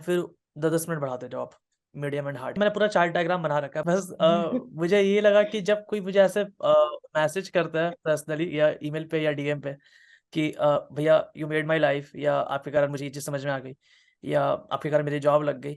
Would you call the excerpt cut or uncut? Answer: cut